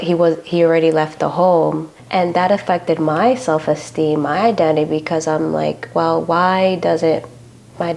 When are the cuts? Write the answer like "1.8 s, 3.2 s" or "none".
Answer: 1.9 s

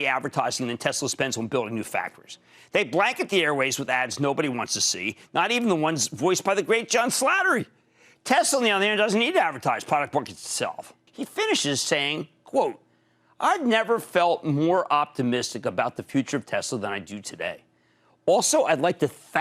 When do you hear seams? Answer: 11.1 s

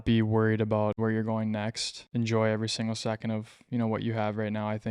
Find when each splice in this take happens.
1.0 s, 1.9 s

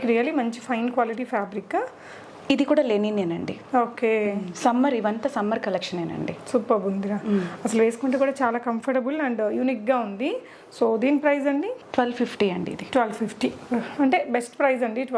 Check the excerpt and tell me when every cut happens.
none

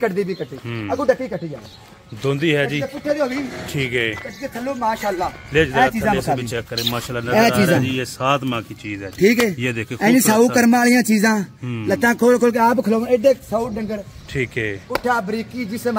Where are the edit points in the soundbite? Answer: none

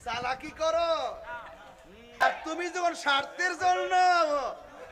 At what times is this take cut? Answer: 2.2 s

